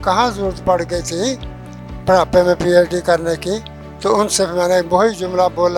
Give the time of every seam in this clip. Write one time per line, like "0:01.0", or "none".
none